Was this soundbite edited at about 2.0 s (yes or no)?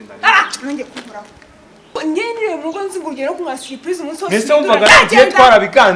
yes